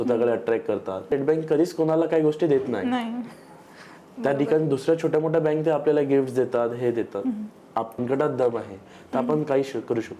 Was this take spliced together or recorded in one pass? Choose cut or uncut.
cut